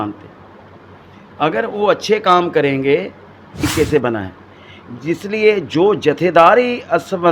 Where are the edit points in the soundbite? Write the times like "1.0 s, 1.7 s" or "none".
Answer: 3.7 s